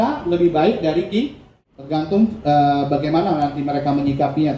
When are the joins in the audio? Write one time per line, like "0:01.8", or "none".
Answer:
0:01.5